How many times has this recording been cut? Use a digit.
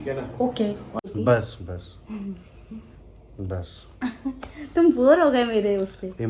1